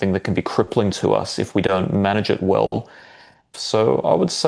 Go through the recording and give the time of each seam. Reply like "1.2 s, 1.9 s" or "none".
3.5 s